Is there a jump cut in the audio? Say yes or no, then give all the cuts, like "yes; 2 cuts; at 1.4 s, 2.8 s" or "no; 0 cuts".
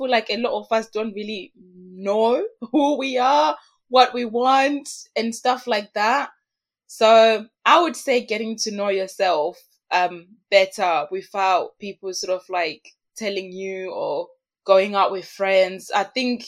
yes; 1 cut; at 14.4 s